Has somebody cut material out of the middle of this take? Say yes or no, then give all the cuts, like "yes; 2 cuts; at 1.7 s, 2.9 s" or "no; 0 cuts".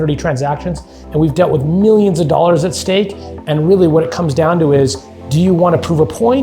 yes; 1 cut; at 1.0 s